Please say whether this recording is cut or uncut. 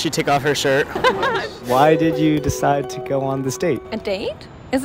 cut